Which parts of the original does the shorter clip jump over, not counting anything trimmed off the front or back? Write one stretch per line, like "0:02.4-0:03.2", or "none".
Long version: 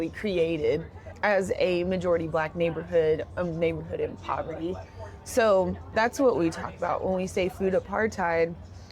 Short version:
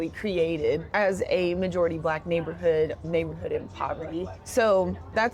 0:00.9-0:01.2
0:03.3-0:03.5
0:04.9-0:05.2

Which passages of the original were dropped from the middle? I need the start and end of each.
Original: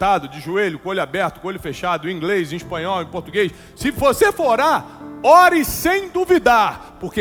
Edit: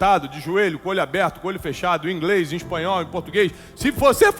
none

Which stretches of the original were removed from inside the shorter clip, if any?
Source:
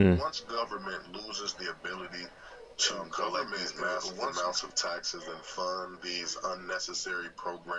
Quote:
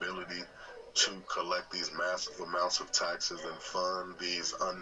none

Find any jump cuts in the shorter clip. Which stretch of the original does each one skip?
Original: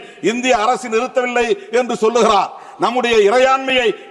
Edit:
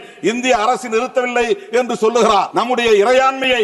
0:02.5-0:02.8

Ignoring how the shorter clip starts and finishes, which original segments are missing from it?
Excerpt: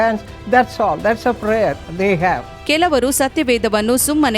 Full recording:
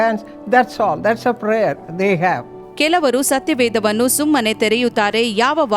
0:02.5-0:02.6

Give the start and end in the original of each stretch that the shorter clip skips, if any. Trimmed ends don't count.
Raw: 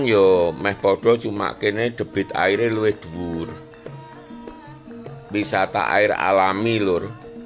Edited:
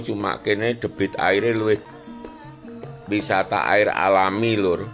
0:03.1-0:04.1

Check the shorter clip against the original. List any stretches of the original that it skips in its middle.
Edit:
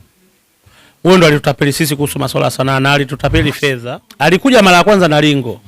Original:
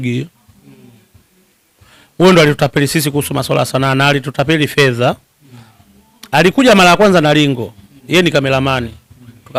0:05.0-0:05.9

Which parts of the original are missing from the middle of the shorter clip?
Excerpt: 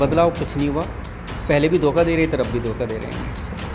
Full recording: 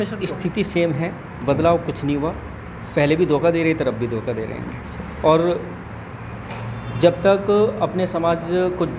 none

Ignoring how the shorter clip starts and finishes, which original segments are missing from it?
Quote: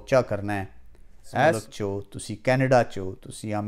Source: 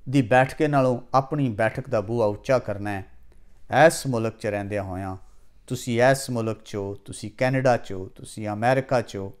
0:04.0-0:06.6

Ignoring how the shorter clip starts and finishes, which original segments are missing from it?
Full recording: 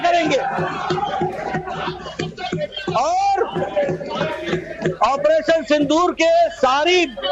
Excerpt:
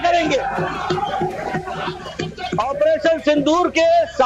0:02.6-0:05.0

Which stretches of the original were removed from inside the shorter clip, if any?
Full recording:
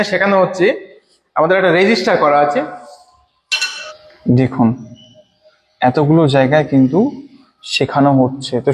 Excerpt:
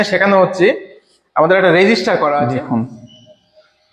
0:02.6-0:04.5

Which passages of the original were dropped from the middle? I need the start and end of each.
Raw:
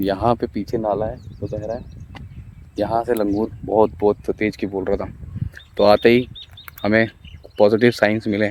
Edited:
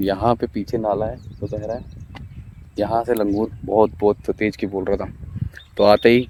none

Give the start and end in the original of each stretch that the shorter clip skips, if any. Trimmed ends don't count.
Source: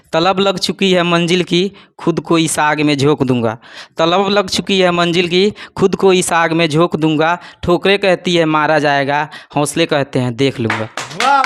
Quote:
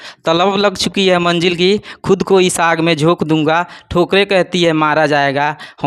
none

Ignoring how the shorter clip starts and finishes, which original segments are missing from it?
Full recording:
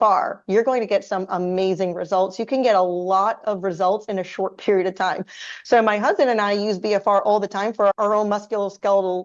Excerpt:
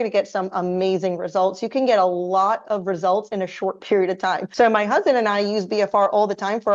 0:05.2-0:05.6

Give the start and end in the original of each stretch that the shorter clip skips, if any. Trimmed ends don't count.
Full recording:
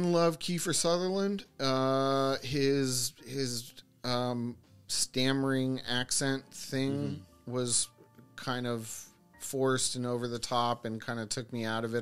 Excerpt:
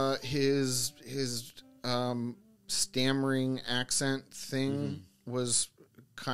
none

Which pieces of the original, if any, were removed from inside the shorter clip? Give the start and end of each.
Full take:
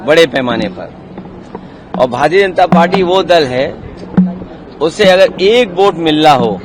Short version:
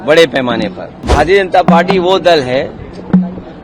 0:01.1-0:02.1

